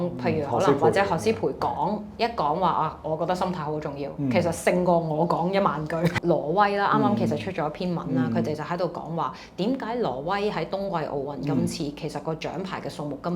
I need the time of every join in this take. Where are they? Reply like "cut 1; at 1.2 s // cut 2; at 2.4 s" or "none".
cut 1; at 6.1 s